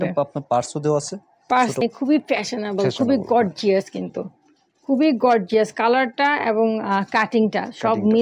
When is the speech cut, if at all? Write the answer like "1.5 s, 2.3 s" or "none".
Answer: 1.8 s